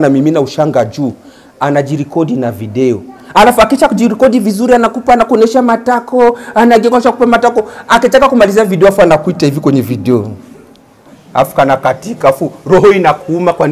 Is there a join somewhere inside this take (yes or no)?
no